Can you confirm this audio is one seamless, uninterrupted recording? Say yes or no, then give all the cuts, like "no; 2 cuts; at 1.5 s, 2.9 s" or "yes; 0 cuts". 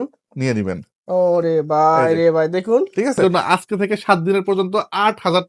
no; 1 cut; at 3.2 s